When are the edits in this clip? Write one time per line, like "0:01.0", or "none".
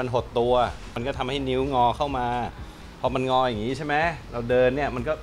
0:01.0